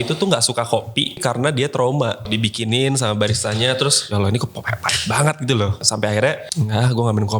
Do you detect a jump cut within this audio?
yes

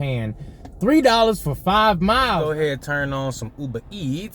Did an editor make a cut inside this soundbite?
yes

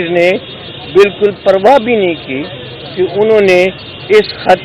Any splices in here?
no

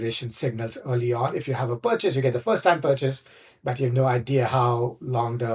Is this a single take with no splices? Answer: yes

